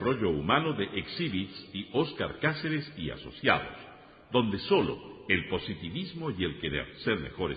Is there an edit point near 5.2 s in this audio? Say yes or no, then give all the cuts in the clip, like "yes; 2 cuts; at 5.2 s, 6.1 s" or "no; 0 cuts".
no; 0 cuts